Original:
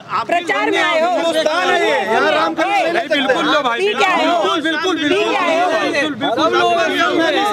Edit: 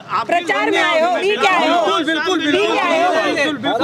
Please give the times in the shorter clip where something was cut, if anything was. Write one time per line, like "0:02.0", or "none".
0:01.2